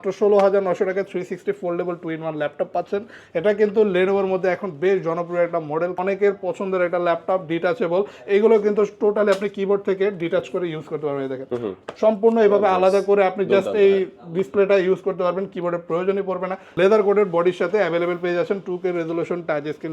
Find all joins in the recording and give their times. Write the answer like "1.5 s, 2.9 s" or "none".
5.9 s, 16.6 s